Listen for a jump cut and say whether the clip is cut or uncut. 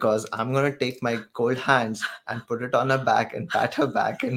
uncut